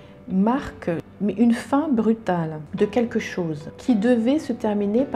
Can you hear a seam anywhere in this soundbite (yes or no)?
yes